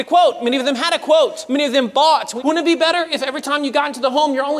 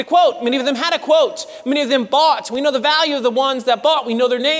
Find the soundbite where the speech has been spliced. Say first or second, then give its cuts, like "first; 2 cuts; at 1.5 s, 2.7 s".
first; 2 cuts; at 1.4 s, 2.3 s